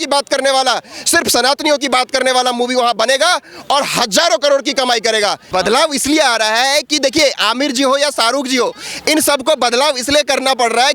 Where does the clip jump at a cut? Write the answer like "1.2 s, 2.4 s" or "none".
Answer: 5.4 s

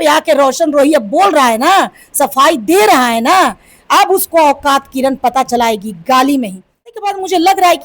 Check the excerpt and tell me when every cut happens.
6.9 s

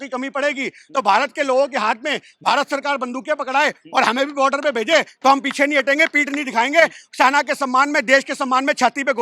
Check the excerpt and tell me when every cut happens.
none

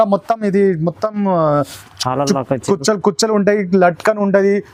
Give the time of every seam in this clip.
none

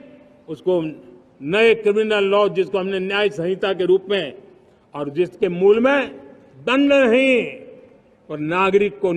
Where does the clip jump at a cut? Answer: none

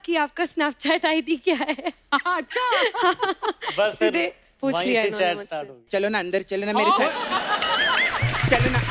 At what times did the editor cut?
5.8 s

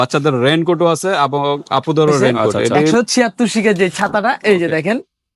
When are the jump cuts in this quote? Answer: 2.9 s

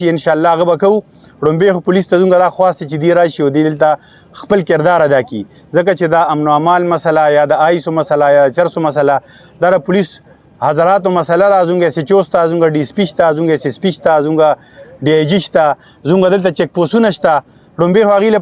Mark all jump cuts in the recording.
none

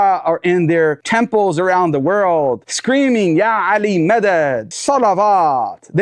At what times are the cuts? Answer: none

